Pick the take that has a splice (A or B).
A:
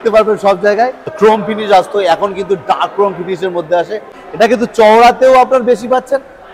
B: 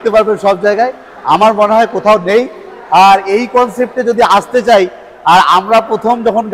A